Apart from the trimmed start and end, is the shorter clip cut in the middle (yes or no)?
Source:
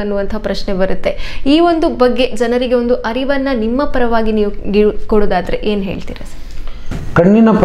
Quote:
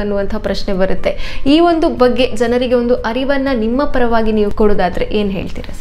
yes